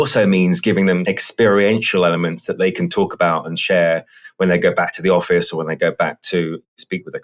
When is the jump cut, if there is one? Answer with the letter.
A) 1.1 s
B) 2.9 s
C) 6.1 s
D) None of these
A